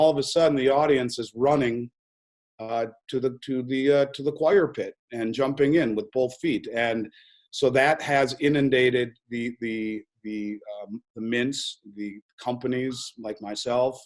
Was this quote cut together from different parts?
no; 0 cuts

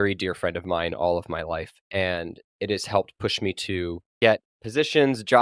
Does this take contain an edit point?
yes; 2 cuts; at 1.8 s, 4.0 s

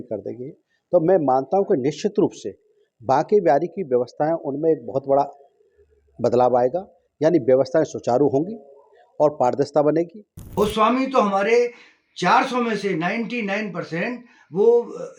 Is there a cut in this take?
yes; 1 cut; at 10.5 s

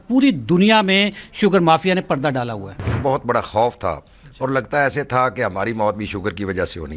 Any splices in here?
yes; 1 cut; at 2.9 s

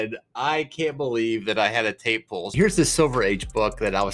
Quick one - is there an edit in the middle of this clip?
yes; 1 cut; at 2.5 s

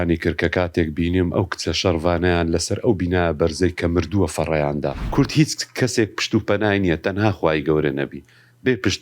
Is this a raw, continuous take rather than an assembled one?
no; 1 cut; at 5.0 s

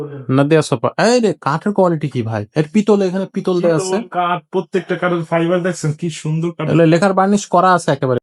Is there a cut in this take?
no; 0 cuts

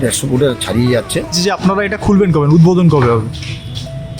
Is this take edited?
yes; 1 cut; at 1.4 s

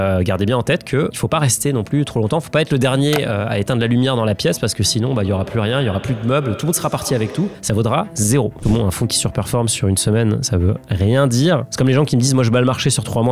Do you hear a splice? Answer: yes; 1 cut; at 8.6 s

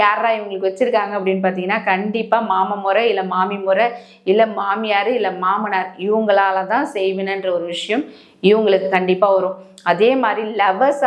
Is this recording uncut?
yes; 0 cuts

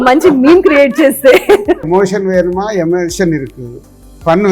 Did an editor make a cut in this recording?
yes; 1 cut; at 1.9 s

